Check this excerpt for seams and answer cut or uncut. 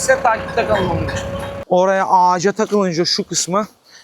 cut